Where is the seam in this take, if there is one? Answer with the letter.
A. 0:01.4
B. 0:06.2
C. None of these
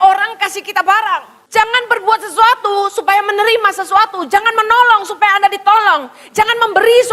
A